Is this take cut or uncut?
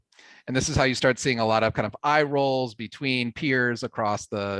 uncut